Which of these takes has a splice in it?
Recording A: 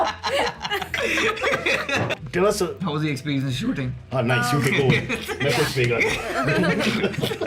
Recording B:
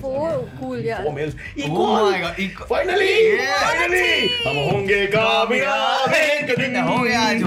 A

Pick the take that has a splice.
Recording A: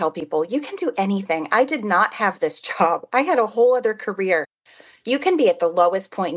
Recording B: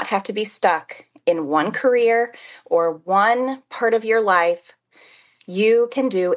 A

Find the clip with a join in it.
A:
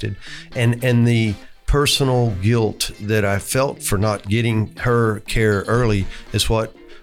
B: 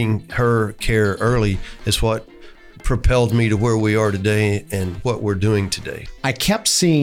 B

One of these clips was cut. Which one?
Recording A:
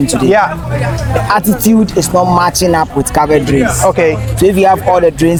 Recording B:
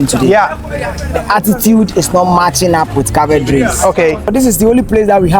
B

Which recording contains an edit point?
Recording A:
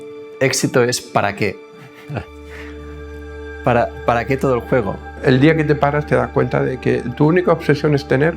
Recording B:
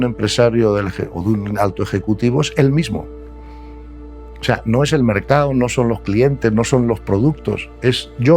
A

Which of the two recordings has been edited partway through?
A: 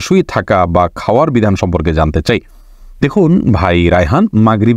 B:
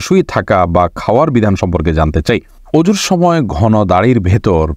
B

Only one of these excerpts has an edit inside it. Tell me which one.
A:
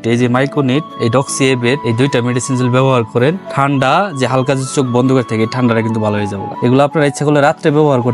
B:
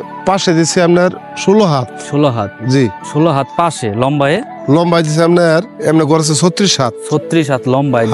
A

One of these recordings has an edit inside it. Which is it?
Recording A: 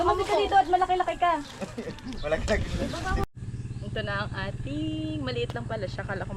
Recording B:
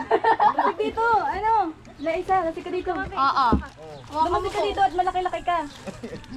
A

